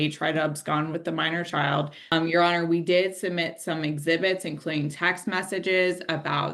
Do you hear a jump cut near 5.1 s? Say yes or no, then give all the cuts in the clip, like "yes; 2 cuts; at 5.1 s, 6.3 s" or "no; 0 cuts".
no; 1 cut; at 2.1 s